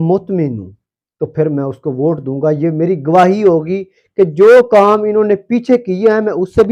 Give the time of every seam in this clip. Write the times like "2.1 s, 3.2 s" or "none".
none